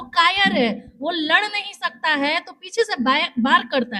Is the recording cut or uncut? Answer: uncut